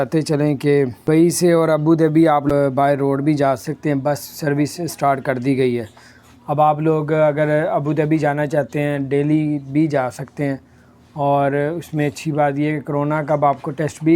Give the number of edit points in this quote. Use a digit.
2